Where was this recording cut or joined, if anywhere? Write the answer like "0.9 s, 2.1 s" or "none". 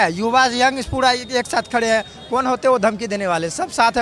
none